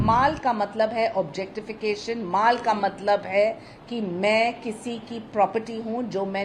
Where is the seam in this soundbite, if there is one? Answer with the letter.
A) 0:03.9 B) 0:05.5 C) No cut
C